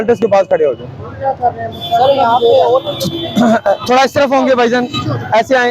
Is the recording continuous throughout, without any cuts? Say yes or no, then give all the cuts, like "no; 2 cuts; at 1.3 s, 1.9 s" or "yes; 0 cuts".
yes; 0 cuts